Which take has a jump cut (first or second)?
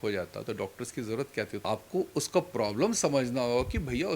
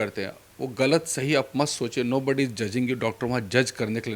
first